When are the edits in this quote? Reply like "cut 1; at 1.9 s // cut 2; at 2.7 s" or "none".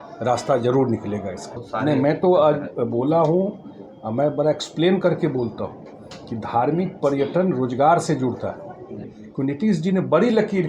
cut 1; at 1.5 s // cut 2; at 9.2 s